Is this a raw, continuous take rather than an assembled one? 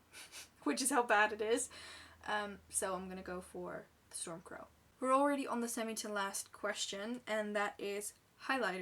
yes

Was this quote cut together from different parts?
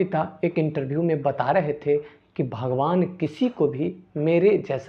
no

